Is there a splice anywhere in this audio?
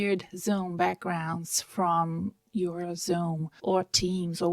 yes; 1 cut; at 3.5 s

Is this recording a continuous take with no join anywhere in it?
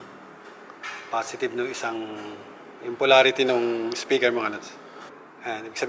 yes; 0 cuts

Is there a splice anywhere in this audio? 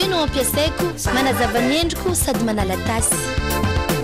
no; 0 cuts

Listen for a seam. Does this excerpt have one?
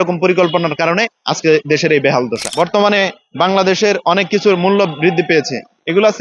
yes; 1 cut; at 2.4 s

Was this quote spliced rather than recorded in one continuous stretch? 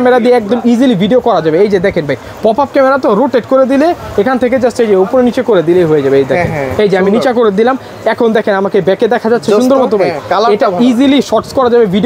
no; 0 cuts

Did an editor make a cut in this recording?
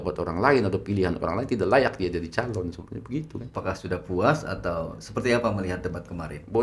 yes; 1 cut; at 3.5 s

